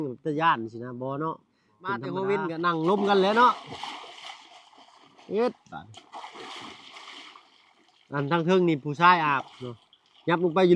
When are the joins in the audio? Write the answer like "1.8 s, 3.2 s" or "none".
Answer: 2.1 s